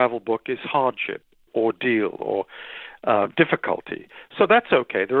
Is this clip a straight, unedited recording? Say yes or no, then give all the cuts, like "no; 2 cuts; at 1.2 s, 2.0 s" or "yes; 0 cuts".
no; 1 cut; at 1.5 s